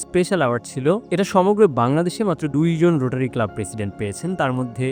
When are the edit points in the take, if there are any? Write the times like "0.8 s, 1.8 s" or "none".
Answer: none